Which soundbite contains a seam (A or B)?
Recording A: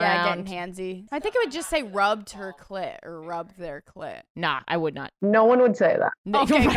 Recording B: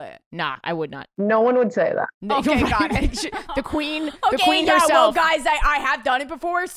A